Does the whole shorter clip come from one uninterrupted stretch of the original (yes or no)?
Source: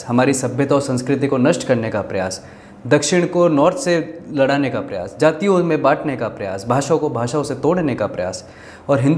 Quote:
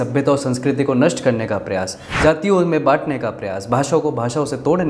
no